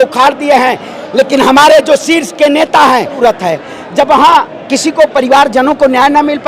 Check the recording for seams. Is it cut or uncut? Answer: cut